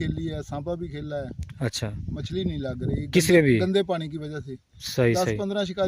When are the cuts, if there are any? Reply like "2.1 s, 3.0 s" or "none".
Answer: none